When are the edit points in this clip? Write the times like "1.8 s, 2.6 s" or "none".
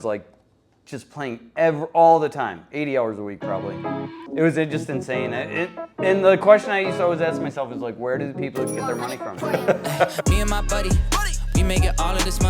10.2 s